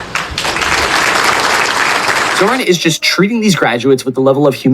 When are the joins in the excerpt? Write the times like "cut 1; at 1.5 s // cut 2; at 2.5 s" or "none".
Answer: cut 1; at 2.3 s